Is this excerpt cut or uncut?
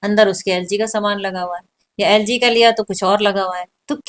uncut